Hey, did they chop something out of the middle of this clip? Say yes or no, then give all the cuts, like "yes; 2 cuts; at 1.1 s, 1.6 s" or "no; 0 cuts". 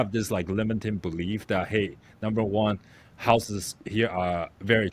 no; 0 cuts